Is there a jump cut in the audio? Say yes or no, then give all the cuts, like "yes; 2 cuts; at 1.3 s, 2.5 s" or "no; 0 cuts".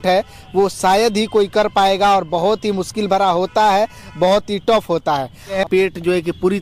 yes; 1 cut; at 5.5 s